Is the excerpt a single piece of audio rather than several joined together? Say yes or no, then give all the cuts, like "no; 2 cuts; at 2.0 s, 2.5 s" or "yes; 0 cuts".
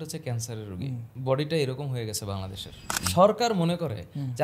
no; 2 cuts; at 1.1 s, 3.0 s